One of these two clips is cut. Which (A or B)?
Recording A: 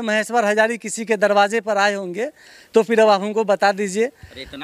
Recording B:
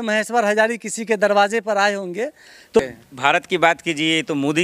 B